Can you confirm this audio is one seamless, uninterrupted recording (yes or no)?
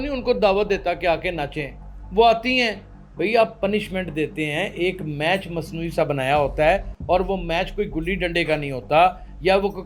yes